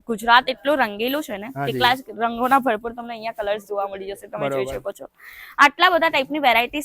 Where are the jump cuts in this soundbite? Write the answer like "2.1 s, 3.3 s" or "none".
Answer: none